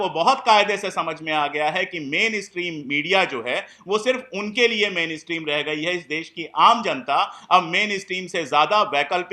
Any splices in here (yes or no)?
no